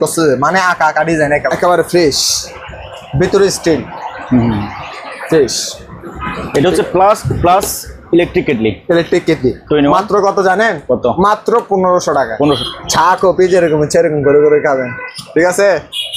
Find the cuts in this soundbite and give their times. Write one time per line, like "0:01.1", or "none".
0:01.5
0:12.6